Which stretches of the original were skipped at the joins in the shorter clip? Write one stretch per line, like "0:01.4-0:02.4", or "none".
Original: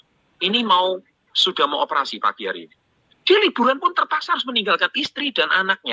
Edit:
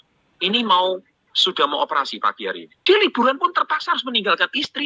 0:02.7-0:03.1